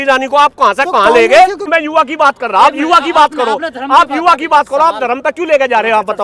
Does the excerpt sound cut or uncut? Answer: cut